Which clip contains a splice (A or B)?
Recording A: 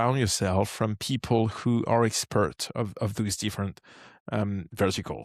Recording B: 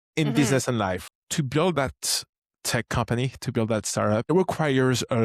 B